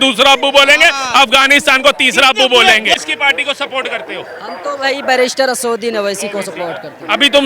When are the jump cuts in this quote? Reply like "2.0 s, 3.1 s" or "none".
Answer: 3.0 s

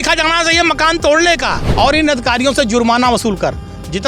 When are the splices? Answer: 1.6 s

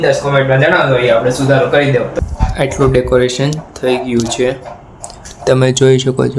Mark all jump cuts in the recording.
2.1 s

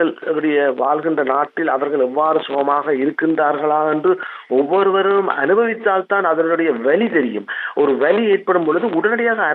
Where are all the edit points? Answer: none

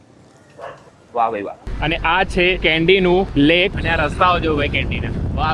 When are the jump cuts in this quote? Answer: 1.6 s, 2.6 s, 3.5 s

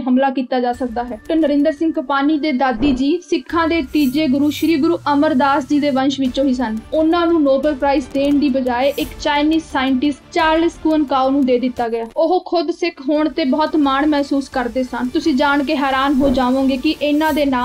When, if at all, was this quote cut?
1.2 s, 6.8 s, 12.1 s, 15.1 s

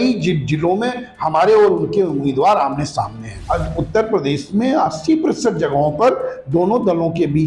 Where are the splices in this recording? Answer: 3.3 s

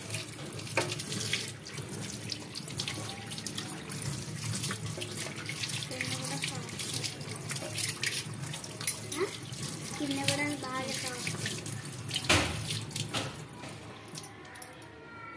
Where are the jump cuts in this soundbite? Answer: none

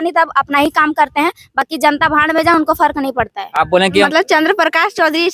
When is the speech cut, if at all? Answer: 3.9 s

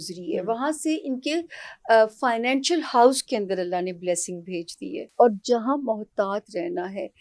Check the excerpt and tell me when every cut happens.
5.0 s

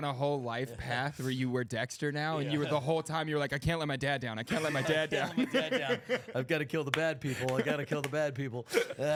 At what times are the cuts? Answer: none

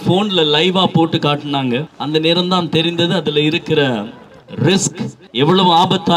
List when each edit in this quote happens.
5.2 s

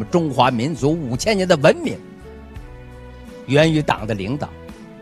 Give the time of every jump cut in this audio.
none

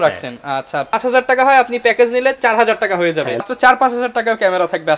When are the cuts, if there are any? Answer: 1.0 s, 3.4 s

